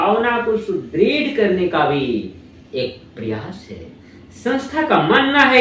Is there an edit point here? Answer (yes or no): no